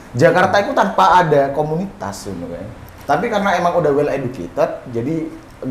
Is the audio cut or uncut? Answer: uncut